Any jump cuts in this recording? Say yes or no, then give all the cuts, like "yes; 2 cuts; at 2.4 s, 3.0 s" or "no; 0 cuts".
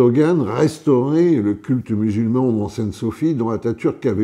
no; 0 cuts